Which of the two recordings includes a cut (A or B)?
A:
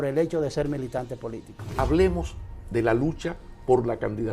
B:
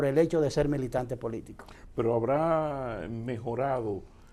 A